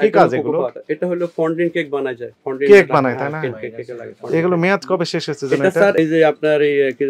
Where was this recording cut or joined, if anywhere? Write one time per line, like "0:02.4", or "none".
0:06.0